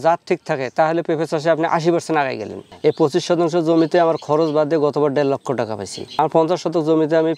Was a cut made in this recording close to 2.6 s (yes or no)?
yes